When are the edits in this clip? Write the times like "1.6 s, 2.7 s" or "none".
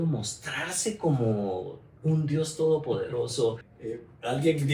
3.7 s